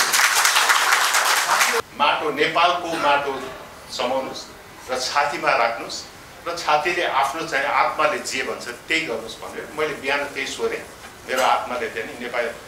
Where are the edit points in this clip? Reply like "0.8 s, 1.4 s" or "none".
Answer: 1.8 s